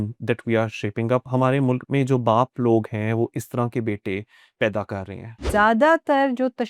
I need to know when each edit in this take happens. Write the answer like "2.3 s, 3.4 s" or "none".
5.5 s